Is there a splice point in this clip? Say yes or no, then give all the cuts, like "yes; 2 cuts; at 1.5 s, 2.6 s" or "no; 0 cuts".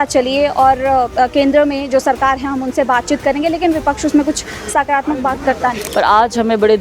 yes; 1 cut; at 5.8 s